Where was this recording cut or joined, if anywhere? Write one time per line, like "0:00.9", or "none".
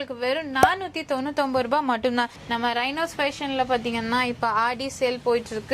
0:02.4